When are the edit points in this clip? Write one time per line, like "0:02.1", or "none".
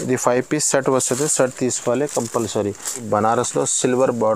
0:03.0